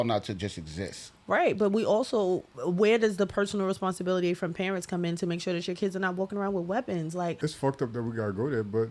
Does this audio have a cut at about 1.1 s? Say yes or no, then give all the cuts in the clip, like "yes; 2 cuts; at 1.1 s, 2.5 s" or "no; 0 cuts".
no; 2 cuts; at 2.5 s, 7.4 s